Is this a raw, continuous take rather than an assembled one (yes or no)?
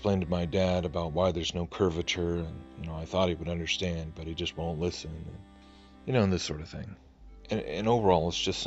no